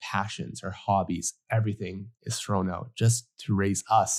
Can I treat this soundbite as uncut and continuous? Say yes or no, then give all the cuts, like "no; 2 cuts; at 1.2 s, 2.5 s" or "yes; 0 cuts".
yes; 0 cuts